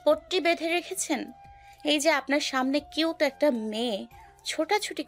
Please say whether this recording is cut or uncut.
uncut